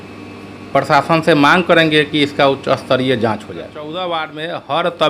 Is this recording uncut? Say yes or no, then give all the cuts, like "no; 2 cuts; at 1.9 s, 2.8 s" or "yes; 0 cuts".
no; 1 cut; at 3.8 s